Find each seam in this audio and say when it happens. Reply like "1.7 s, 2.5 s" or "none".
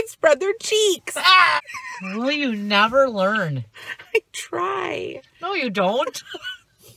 1.6 s